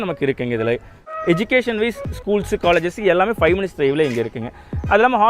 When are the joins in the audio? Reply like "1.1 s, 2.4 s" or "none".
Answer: 1.1 s